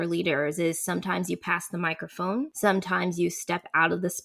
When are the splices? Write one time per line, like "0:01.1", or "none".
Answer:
0:02.5